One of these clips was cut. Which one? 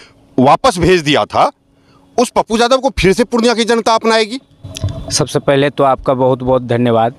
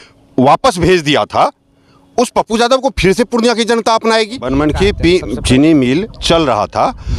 second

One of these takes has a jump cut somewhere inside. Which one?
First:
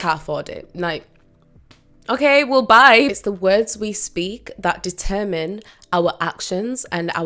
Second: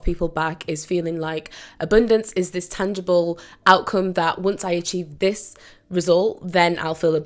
first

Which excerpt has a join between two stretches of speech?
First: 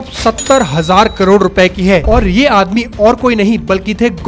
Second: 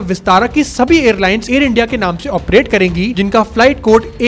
first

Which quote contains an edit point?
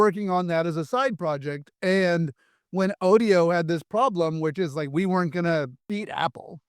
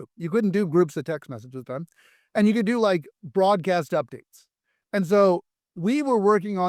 first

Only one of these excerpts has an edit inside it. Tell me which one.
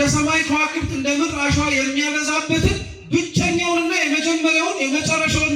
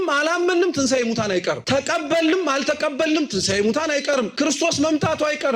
second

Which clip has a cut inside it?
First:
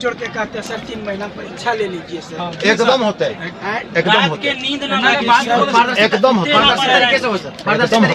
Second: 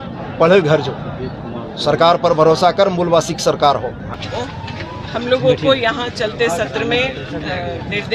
second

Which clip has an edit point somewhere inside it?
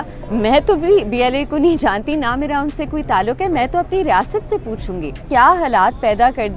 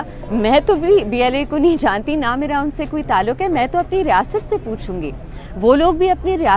first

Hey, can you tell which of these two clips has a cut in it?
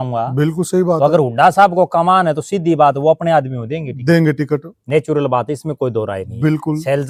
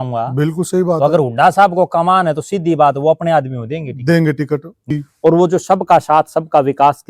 second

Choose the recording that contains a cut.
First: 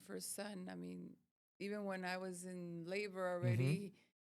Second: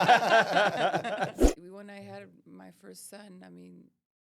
second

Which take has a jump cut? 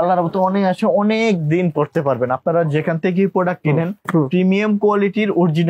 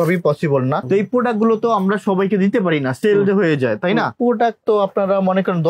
second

